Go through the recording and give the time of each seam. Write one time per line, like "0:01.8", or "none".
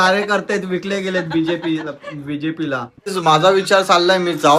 0:03.1